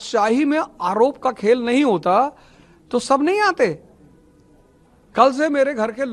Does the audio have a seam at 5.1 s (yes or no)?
no